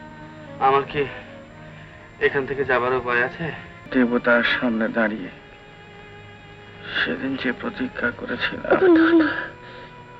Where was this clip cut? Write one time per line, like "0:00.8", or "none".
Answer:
0:03.8